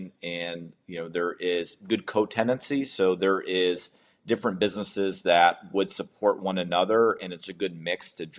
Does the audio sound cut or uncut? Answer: uncut